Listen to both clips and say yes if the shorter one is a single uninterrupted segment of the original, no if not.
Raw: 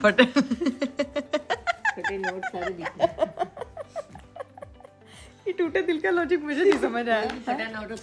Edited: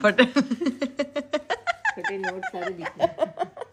yes